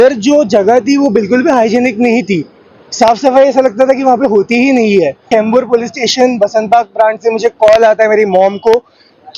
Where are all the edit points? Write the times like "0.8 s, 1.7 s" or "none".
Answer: 5.2 s